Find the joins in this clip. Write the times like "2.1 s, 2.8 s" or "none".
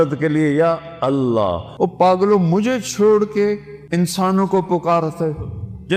1.6 s, 3.7 s